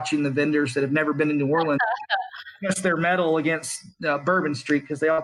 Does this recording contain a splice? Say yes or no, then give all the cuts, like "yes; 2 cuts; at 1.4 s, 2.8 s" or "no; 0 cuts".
no; 0 cuts